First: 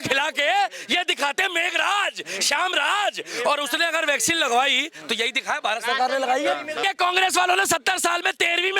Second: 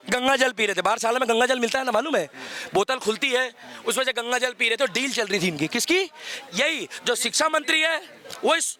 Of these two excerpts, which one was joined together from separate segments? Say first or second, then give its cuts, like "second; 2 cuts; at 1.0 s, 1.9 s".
first; 1 cut; at 6.8 s